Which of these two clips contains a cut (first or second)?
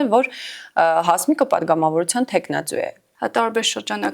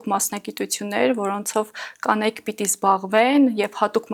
first